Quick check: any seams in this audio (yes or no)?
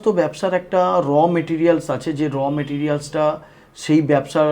no